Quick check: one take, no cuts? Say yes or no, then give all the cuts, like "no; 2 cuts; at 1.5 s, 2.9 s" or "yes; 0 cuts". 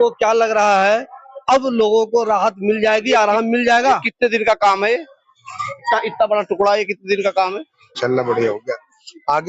no; 1 cut; at 8.0 s